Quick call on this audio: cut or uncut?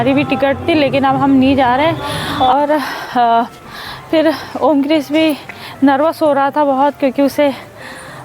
cut